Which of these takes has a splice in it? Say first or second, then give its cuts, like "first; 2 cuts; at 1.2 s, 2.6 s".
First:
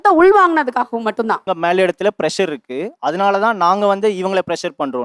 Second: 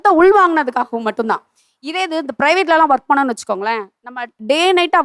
first; 1 cut; at 1.4 s